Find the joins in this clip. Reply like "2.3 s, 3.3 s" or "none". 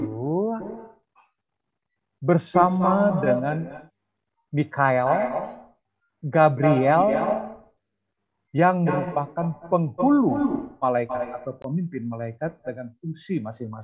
none